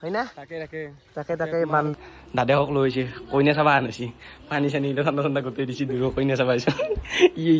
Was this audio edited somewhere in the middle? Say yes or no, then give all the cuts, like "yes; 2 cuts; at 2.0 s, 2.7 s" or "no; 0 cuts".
yes; 1 cut; at 1.8 s